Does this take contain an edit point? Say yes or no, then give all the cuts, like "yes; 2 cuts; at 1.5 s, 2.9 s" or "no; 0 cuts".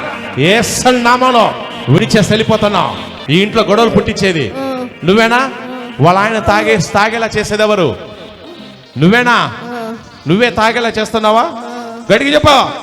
yes; 1 cut; at 3.1 s